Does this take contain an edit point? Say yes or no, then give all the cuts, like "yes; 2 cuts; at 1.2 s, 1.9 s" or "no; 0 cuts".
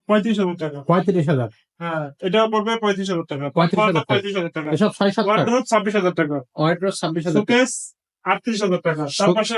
no; 0 cuts